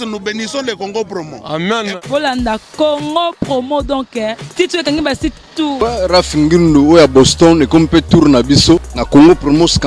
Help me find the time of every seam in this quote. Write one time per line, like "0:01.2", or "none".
0:05.8
0:08.9